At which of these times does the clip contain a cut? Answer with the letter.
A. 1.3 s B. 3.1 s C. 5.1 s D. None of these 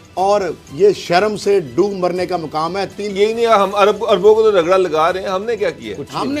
B